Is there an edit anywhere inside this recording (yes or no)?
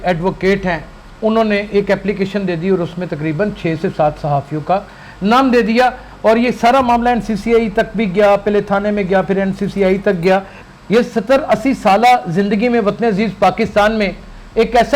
yes